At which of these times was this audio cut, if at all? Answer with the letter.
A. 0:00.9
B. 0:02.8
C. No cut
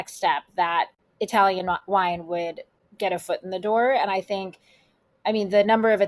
A